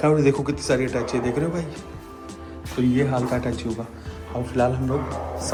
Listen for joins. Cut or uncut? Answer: uncut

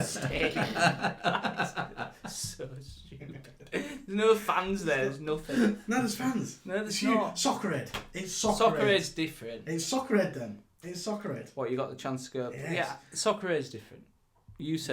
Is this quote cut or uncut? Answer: uncut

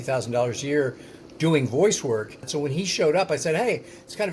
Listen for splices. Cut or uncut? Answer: cut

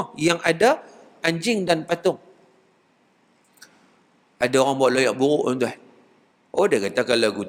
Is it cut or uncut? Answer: uncut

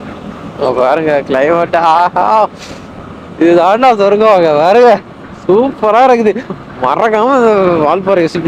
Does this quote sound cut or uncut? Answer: uncut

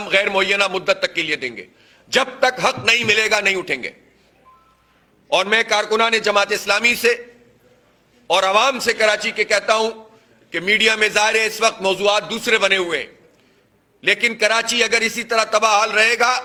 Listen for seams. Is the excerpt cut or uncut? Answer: uncut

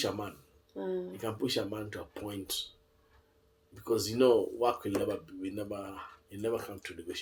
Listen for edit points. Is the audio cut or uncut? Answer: uncut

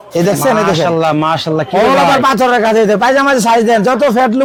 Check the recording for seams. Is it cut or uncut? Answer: uncut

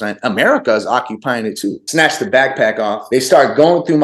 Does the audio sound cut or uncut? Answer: cut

